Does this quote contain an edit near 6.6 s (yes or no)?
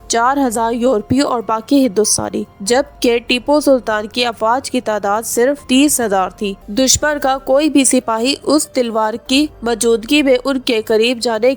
yes